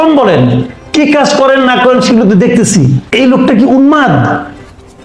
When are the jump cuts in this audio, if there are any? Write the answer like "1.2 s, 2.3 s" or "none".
3.1 s